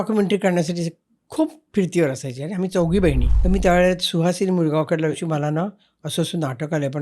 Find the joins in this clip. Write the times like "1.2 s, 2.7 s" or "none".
3.3 s, 5.2 s